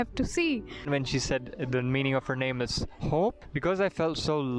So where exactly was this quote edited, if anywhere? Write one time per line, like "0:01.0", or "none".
0:00.9
0:03.5